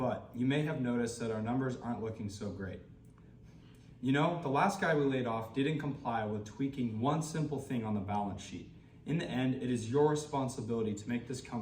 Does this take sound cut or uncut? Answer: uncut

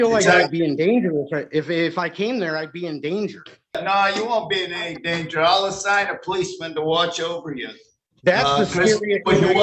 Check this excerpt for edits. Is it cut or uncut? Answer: cut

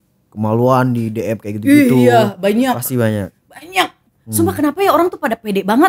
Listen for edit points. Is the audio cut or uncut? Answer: uncut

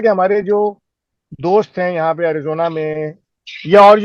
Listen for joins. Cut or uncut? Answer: uncut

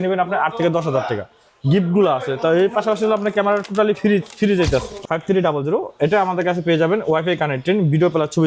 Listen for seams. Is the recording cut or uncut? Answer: cut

